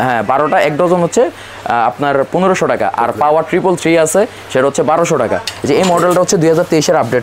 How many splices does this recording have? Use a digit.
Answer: 1